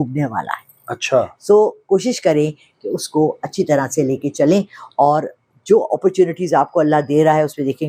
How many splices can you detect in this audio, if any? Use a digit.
0